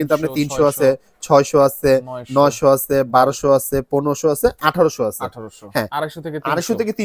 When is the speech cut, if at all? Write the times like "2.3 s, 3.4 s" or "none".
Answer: 5.9 s